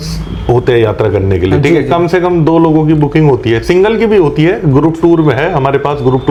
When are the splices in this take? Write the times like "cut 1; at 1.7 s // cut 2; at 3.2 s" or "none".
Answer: none